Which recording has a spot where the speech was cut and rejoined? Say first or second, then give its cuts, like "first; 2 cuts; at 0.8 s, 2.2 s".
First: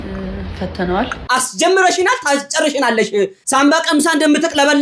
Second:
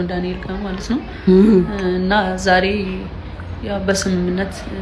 first; 2 cuts; at 1.2 s, 3.4 s